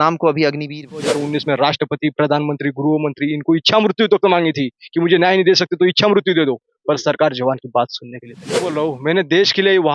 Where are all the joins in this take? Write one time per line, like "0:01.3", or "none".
0:01.1
0:08.7